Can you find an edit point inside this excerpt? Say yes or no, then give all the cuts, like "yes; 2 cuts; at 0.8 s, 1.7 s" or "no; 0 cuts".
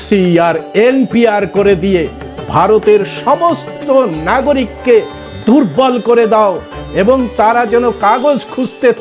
no; 0 cuts